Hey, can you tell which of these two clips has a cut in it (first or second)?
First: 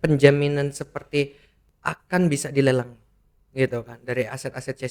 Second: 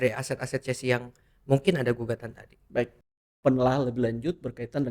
second